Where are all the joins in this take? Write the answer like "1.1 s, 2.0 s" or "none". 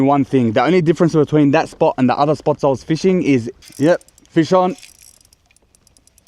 3.5 s